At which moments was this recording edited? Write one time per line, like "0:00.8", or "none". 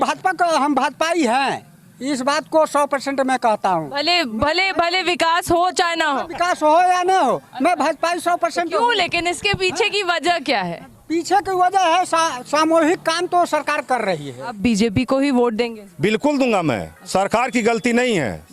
0:14.5